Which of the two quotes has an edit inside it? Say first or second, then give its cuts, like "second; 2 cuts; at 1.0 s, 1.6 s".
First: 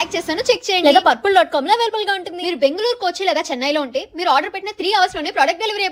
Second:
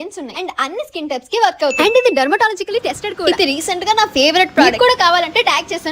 second; 3 cuts; at 1.8 s, 3.2 s, 4.7 s